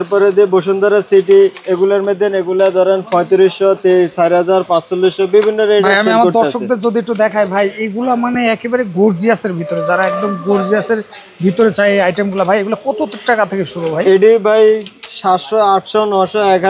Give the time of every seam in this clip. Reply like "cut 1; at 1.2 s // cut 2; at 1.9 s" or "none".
none